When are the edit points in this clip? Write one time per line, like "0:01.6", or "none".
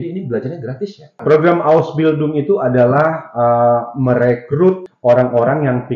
0:01.2
0:04.9